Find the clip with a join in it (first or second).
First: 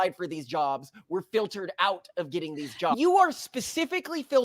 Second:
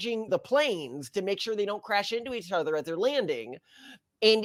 first